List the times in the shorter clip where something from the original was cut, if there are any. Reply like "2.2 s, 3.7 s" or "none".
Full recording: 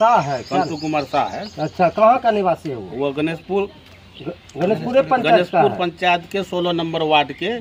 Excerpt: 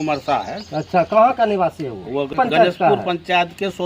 2.3 s